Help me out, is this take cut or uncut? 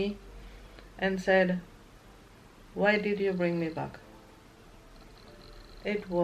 uncut